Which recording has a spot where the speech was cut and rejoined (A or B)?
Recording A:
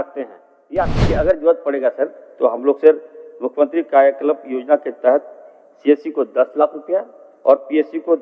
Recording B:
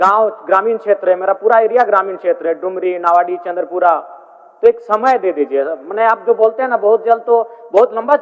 A